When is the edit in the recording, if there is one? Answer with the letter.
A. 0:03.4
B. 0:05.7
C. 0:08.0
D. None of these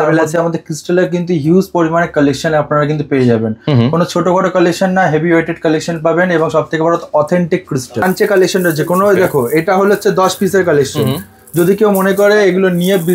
C